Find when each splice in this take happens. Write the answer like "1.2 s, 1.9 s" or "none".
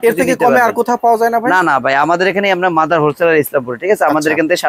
none